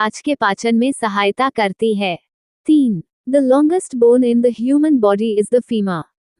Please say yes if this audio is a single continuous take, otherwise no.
no